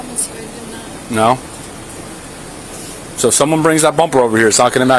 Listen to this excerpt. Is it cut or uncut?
uncut